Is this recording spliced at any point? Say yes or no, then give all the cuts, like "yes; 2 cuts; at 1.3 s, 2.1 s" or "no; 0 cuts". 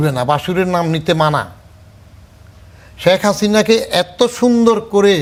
no; 0 cuts